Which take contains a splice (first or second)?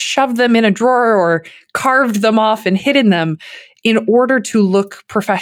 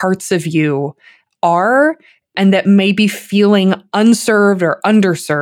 second